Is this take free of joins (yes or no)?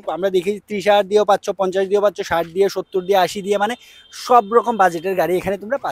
yes